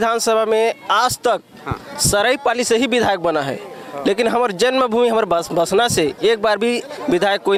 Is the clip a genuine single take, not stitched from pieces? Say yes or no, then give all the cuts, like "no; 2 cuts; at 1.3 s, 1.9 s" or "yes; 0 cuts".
yes; 0 cuts